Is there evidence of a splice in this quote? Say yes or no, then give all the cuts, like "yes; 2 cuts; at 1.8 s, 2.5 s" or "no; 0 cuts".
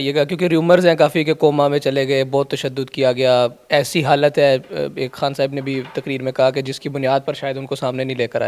no; 0 cuts